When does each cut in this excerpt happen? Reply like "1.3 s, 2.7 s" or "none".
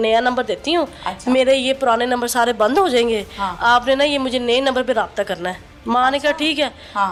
none